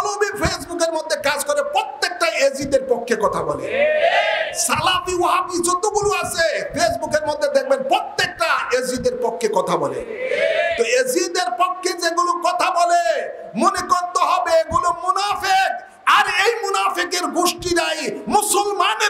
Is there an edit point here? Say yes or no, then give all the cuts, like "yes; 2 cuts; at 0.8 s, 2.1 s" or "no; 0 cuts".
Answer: no; 0 cuts